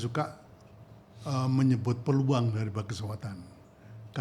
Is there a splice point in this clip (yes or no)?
no